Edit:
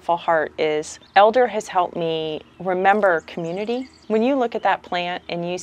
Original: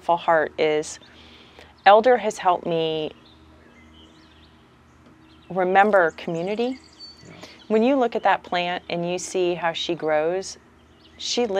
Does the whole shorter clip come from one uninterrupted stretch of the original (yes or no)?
no